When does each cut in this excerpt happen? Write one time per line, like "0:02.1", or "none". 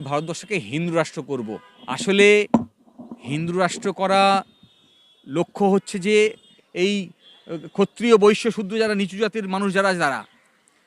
0:01.7
0:06.6